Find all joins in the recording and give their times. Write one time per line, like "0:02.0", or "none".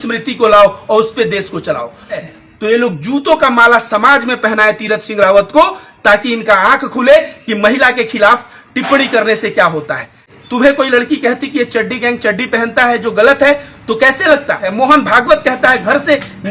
0:02.2
0:10.3
0:14.7